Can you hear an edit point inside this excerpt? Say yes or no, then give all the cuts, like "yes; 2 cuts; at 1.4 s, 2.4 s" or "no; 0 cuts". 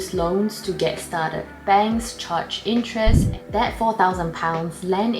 yes; 1 cut; at 3.3 s